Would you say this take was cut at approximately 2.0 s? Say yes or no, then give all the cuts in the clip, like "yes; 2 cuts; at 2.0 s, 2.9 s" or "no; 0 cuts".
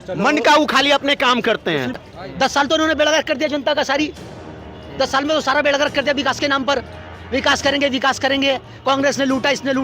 yes; 1 cut; at 2.0 s